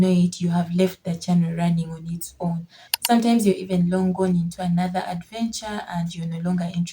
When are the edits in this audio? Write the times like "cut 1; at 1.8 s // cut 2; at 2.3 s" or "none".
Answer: cut 1; at 2.8 s